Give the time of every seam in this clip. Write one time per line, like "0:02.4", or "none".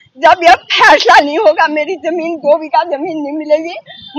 none